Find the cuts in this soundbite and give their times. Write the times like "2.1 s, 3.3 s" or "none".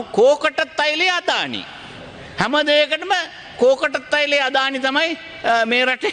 none